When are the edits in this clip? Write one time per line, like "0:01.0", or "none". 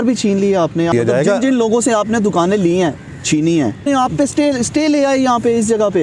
0:01.0
0:03.9